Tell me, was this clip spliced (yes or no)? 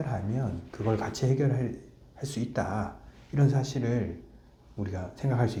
no